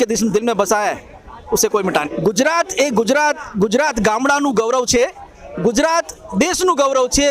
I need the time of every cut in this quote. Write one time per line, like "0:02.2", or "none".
0:02.1